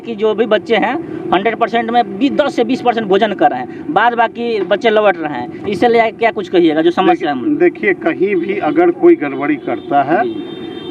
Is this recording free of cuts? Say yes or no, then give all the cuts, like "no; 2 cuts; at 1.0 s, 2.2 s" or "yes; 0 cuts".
yes; 0 cuts